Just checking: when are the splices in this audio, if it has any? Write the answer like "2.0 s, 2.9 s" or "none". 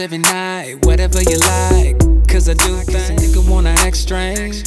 3.0 s